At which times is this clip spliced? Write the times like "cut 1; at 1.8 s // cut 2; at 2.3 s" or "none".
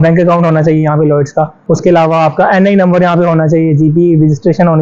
cut 1; at 1.6 s